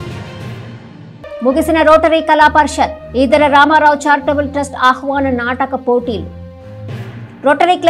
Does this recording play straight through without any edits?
no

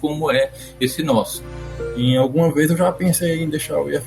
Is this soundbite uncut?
no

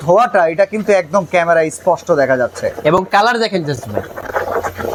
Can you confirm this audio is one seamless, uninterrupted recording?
yes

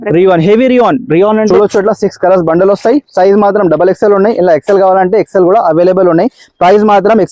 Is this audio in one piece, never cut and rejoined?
no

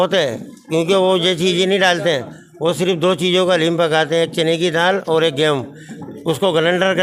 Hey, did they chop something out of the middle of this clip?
no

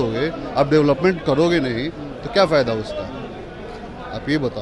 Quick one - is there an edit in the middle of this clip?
no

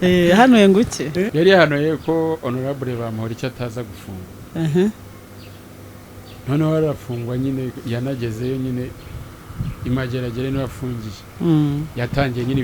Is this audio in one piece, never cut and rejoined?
no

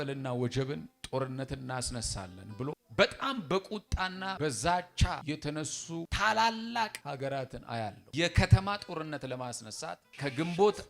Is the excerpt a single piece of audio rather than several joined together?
no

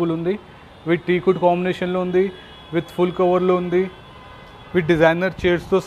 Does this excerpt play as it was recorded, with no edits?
yes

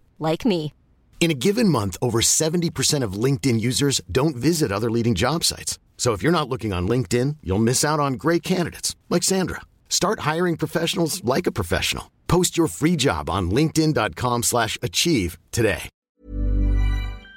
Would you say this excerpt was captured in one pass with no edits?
no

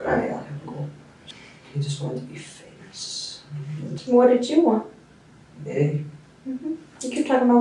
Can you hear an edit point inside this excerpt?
yes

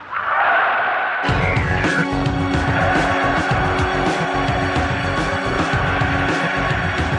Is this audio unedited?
yes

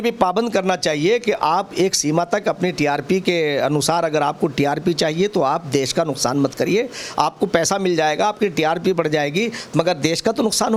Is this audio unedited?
yes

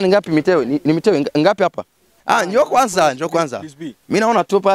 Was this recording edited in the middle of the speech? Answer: yes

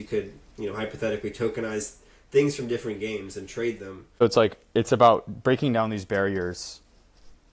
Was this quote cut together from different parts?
yes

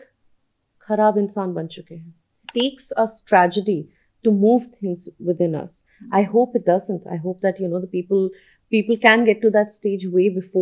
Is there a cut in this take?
yes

